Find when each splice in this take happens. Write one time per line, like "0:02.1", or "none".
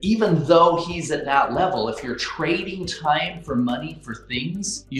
none

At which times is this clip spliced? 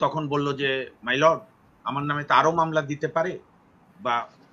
none

